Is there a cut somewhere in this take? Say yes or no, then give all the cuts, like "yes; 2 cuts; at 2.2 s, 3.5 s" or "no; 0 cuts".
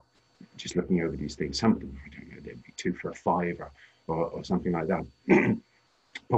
no; 0 cuts